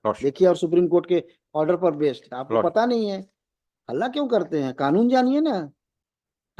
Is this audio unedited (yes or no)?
yes